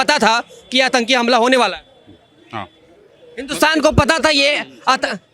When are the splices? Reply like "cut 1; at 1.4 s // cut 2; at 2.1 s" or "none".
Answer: none